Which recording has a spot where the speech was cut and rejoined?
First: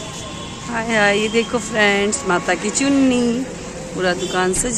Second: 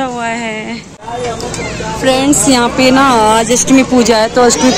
second; 1 cut; at 0.9 s

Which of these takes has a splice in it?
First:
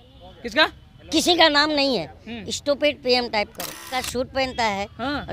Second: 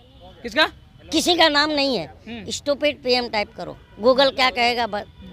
first; 1 cut; at 3.9 s

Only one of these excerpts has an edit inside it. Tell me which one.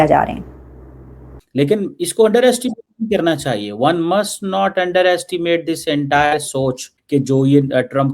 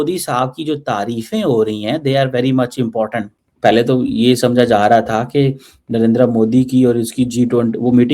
first; 2 cuts; at 1.4 s, 7.0 s

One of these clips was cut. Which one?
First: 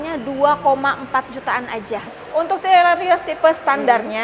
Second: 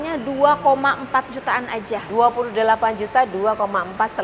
first; 1 cut; at 2.1 s

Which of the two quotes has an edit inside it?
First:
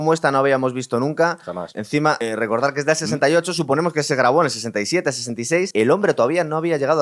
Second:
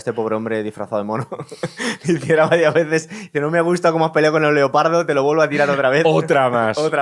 first; 2 cuts; at 2.0 s, 5.7 s

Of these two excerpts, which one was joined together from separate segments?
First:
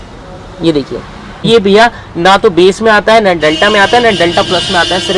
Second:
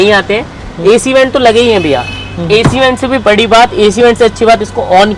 first; 1 cut; at 1.5 s

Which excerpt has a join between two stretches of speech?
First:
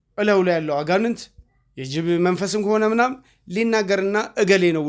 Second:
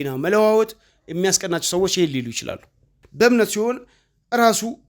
second; 1 cut; at 3.0 s

